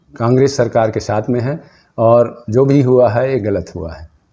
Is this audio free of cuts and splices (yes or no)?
yes